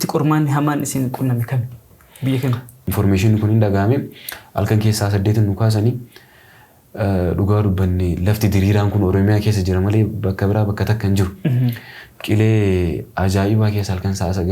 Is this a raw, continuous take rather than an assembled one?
no; 1 cut; at 2.8 s

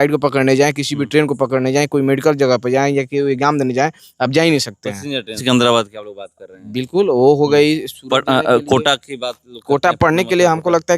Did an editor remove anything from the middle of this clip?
yes; 1 cut; at 5.4 s

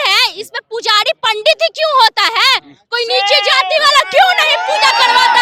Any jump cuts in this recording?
no; 0 cuts

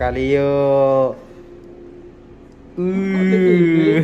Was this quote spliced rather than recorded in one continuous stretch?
no; 0 cuts

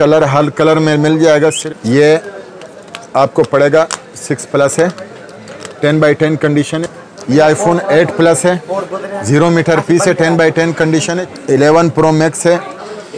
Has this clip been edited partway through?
yes; 3 cuts; at 1.7 s, 6.8 s, 11.2 s

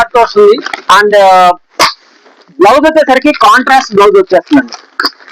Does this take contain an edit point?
no; 0 cuts

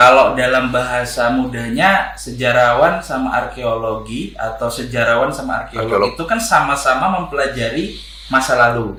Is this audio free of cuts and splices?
yes; 0 cuts

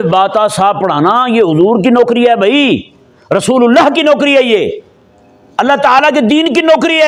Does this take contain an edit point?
no; 0 cuts

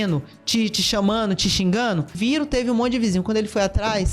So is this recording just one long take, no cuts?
yes; 0 cuts

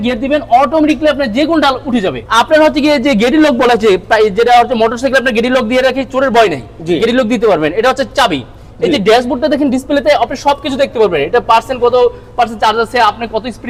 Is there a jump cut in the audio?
no; 0 cuts

